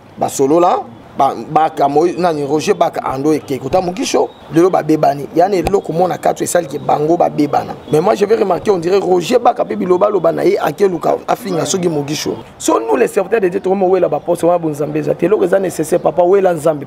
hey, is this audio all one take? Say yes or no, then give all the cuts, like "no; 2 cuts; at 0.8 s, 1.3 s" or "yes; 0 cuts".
no; 4 cuts; at 1.0 s, 4.4 s, 7.8 s, 12.5 s